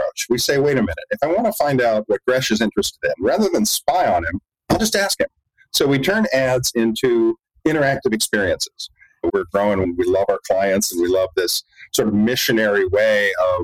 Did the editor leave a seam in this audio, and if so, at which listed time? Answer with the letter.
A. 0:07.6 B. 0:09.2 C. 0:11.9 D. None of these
B